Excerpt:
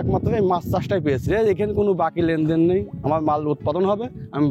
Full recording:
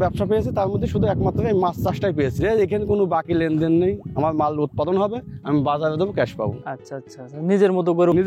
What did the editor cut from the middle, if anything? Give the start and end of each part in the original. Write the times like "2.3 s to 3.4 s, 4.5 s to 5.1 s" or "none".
none